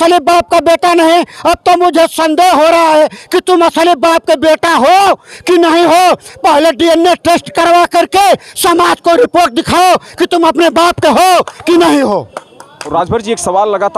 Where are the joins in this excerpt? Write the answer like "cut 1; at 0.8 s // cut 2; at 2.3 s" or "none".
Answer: cut 1; at 12.9 s